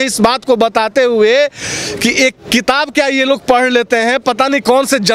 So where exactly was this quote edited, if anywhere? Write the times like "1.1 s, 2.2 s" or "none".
none